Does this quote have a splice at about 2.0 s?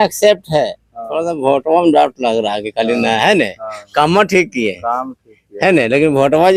no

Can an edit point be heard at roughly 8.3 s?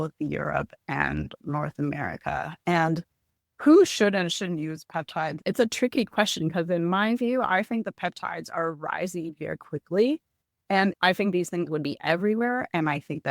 no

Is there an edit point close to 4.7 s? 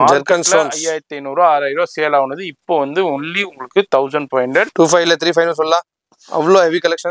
yes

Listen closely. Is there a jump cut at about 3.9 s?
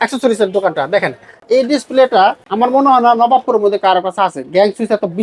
no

